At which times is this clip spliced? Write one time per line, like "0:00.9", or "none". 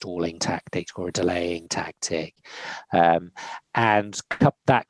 none